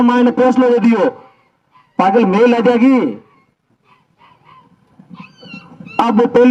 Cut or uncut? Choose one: uncut